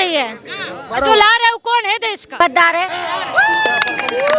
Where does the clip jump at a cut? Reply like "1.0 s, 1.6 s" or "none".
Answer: 2.4 s, 2.9 s